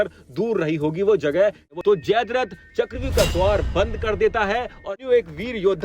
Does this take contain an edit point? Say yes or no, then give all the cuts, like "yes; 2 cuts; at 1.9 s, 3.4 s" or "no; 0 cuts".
yes; 2 cuts; at 1.7 s, 5.0 s